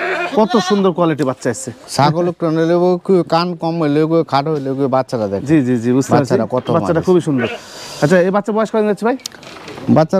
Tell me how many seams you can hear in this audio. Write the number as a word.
zero